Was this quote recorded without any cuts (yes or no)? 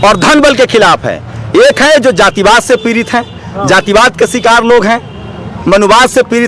yes